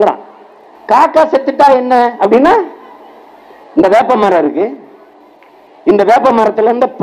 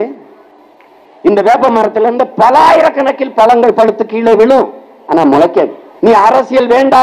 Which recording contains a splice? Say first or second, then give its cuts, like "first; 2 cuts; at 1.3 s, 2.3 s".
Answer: second; 1 cut; at 5.8 s